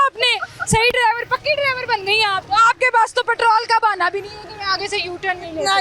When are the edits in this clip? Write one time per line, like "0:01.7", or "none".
0:02.4